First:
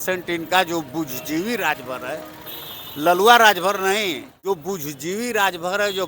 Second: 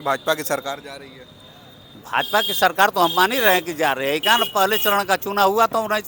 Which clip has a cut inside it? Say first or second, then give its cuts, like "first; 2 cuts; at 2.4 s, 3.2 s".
first; 1 cut; at 4.3 s